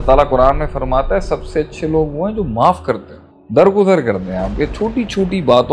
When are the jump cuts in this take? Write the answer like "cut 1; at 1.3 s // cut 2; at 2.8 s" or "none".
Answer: none